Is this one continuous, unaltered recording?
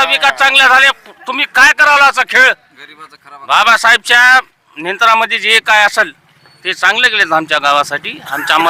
yes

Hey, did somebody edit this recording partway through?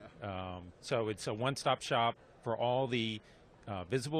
yes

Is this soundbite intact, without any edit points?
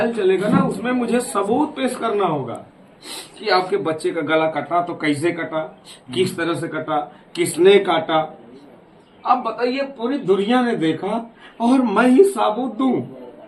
yes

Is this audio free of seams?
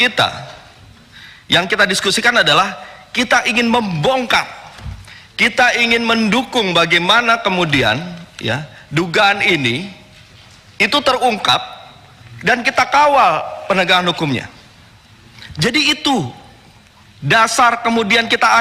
yes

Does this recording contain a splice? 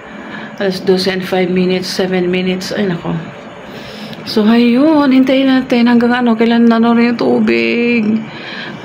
no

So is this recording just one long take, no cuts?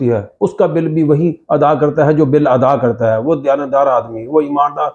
yes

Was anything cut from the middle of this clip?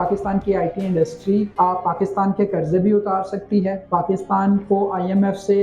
yes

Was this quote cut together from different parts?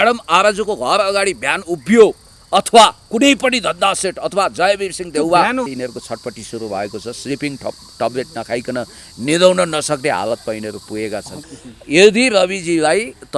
yes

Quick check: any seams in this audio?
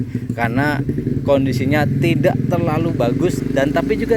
no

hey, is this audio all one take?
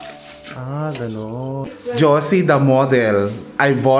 no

